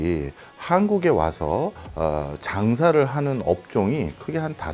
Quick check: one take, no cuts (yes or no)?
yes